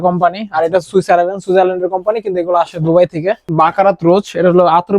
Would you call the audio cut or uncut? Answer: cut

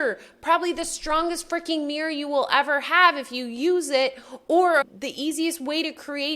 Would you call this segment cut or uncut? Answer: cut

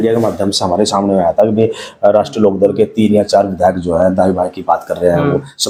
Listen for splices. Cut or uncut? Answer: uncut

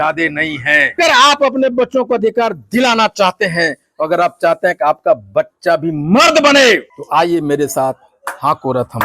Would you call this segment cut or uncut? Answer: cut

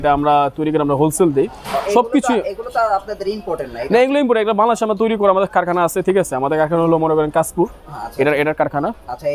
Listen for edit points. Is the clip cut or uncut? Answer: uncut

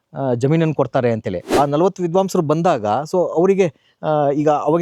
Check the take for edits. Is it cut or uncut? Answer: cut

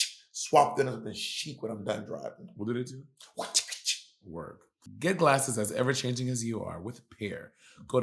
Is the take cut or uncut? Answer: uncut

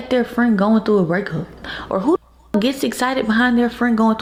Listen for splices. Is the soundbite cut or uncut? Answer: uncut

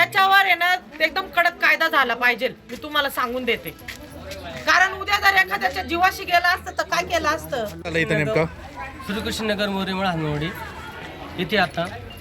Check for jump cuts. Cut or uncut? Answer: cut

